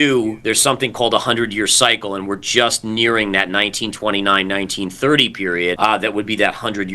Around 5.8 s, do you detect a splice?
yes; 1 cut; at 5.8 s

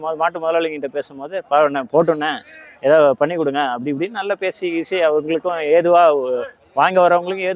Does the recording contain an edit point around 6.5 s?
no; 0 cuts

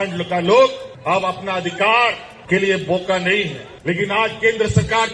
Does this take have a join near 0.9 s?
yes; 3 cuts; at 0.9 s, 2.3 s, 3.6 s

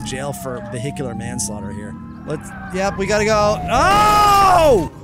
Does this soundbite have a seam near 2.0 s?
yes; 1 cut; at 2.0 s

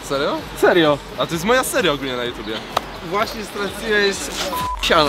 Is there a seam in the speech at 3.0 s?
yes; 1 cut; at 3.0 s

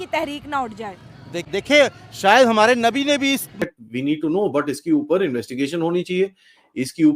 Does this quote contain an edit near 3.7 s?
yes; 1 cut; at 3.7 s

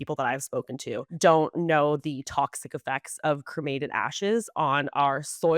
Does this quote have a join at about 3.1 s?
no; 1 cut; at 1.1 s

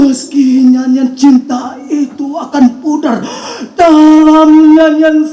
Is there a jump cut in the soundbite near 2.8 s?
no; 0 cuts

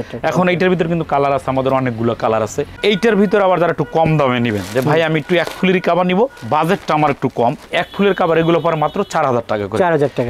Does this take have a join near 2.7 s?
no; 0 cuts

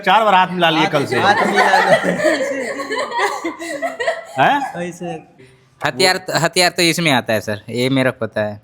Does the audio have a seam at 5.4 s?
yes; 1 cut; at 5.4 s

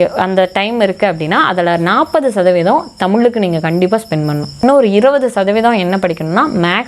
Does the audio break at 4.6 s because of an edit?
yes; 1 cut; at 4.6 s

